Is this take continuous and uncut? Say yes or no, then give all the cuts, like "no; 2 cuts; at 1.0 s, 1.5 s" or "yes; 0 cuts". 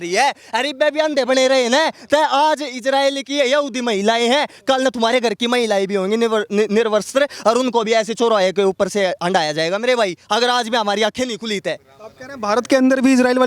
yes; 0 cuts